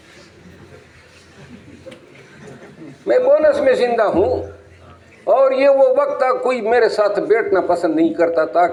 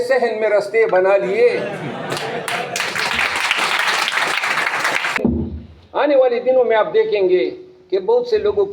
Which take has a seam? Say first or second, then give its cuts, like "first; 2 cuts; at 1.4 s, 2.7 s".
second; 1 cut; at 5.2 s